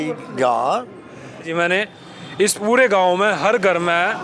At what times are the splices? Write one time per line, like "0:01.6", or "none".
0:01.5